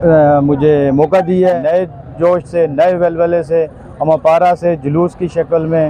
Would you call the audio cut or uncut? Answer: cut